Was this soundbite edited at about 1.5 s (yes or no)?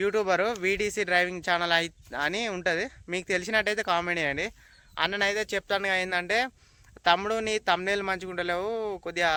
no